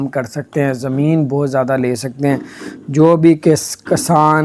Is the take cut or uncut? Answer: uncut